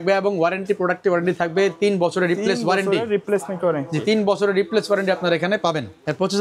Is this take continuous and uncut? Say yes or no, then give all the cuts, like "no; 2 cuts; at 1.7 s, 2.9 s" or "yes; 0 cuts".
yes; 0 cuts